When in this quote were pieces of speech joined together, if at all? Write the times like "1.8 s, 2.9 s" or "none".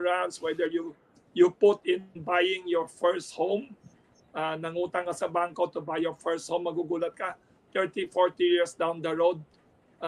none